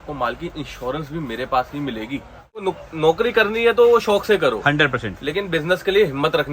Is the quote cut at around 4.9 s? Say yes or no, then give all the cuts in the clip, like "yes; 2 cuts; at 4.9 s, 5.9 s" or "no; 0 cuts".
no; 1 cut; at 2.6 s